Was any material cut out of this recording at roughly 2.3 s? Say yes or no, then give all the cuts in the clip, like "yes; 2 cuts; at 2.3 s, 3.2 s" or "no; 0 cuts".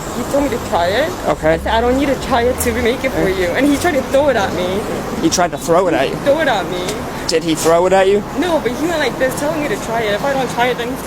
no; 0 cuts